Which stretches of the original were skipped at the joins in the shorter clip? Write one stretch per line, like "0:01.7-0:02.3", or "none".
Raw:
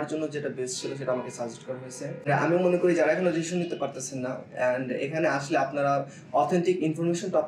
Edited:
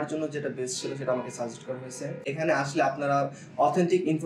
0:02.2-0:05.0